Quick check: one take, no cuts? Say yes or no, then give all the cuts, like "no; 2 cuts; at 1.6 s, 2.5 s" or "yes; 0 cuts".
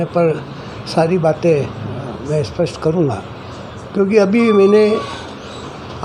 yes; 0 cuts